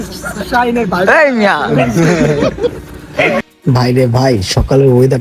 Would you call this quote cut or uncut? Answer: cut